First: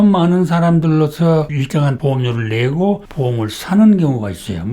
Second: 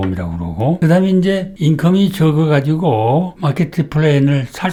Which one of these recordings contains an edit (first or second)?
first